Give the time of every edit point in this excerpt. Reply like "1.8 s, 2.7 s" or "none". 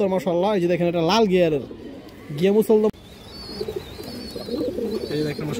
2.9 s